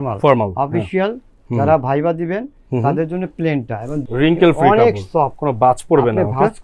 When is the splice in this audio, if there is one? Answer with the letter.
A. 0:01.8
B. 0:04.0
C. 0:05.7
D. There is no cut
B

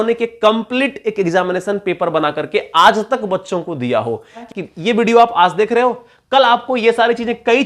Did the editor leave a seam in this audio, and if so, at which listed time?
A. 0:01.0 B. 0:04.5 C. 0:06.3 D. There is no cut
B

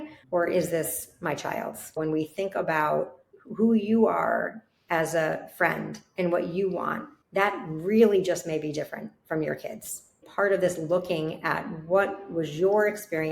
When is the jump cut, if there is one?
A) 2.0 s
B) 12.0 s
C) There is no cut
A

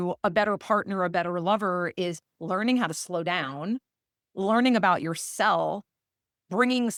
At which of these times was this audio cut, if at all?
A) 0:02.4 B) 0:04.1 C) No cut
C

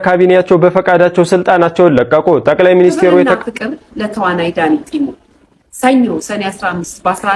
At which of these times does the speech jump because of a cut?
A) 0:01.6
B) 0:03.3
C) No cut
B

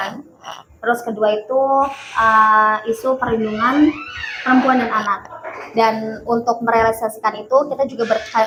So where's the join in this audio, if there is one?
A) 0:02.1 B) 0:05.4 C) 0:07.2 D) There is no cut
D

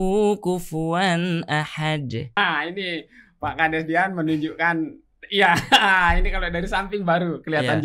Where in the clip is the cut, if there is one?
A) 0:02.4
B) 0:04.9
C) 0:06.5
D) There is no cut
A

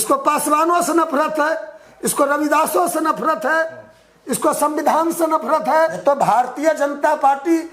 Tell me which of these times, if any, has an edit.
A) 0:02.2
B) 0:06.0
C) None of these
B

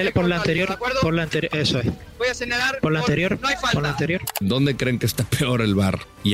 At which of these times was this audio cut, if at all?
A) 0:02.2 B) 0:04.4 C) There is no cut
B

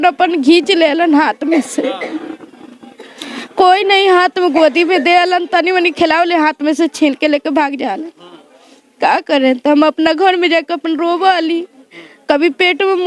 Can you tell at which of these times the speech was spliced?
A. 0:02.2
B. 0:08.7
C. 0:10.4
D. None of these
D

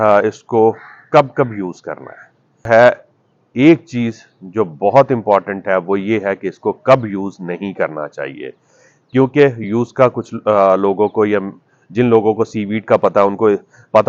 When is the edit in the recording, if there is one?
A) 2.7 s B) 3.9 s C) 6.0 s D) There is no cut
A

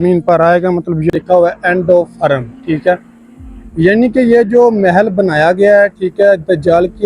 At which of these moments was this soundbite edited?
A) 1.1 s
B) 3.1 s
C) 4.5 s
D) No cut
A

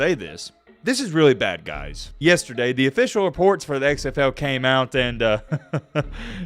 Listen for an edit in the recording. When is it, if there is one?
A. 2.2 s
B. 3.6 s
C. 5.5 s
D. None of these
A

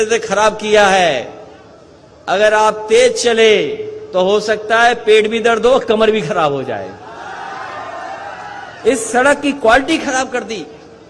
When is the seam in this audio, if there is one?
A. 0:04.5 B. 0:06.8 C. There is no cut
C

